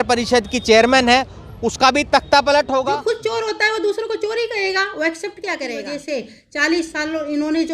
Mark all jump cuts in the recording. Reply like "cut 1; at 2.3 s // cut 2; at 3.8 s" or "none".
cut 1; at 2.8 s // cut 2; at 5.9 s